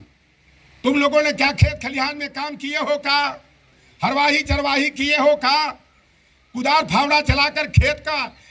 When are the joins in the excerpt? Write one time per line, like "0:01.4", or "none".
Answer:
none